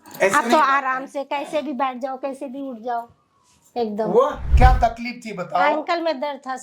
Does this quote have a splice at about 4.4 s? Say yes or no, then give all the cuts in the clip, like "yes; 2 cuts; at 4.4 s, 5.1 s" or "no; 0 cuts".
yes; 1 cut; at 4.4 s